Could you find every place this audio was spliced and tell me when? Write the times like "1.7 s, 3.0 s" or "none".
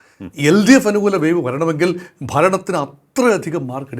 none